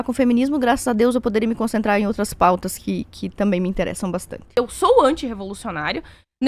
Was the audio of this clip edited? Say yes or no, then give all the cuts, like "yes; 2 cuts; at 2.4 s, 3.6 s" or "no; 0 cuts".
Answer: yes; 1 cut; at 4.5 s